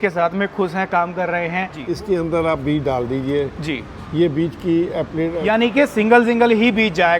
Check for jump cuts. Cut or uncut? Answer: cut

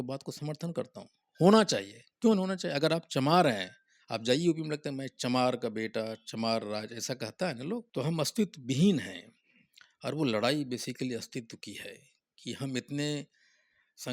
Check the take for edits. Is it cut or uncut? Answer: cut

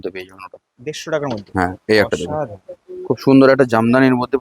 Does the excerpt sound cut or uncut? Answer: uncut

